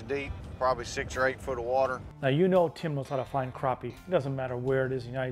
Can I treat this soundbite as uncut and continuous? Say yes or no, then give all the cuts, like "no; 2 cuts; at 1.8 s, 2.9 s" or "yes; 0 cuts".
no; 1 cut; at 2.1 s